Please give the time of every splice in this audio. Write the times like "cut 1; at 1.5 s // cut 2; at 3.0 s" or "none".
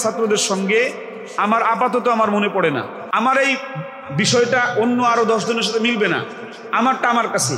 cut 1; at 3.0 s